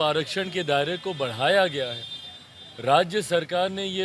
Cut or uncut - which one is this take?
uncut